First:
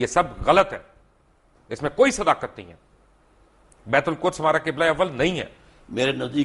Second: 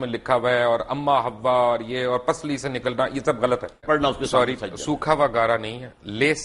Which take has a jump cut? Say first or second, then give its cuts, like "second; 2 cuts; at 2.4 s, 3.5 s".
second; 1 cut; at 3.8 s